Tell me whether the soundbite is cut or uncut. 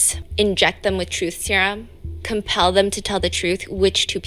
uncut